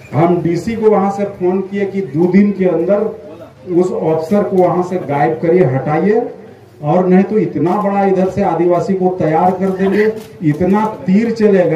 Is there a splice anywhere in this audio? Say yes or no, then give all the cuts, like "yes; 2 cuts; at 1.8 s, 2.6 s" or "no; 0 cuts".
no; 0 cuts